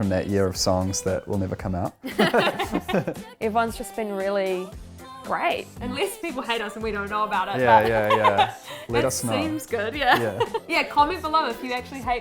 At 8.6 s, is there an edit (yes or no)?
no